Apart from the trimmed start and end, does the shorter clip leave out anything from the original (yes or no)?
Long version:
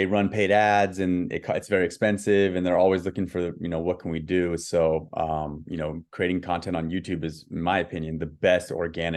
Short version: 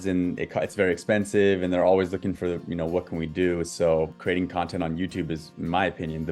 yes